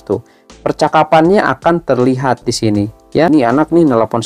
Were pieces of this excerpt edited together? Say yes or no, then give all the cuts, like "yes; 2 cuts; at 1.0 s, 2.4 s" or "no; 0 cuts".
yes; 1 cut; at 3.3 s